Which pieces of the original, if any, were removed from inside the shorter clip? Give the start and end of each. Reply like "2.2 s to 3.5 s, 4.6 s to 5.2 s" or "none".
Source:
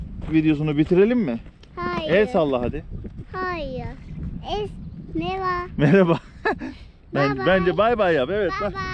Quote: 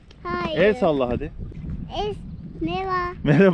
3.0 s to 4.0 s